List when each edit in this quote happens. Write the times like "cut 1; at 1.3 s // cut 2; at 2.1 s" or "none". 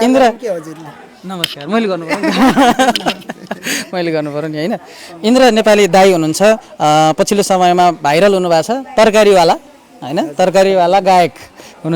none